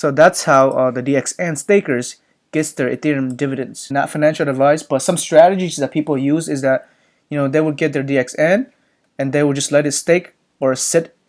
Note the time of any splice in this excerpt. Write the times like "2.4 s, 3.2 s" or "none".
3.9 s